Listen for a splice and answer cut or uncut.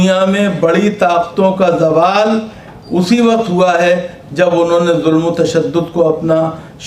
uncut